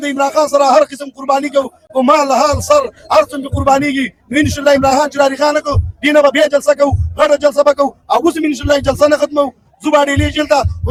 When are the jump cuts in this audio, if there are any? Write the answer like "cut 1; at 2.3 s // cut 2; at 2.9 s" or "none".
none